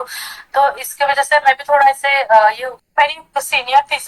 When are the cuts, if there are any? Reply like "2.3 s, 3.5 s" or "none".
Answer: 2.7 s